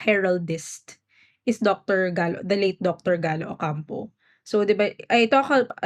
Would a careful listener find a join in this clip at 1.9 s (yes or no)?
no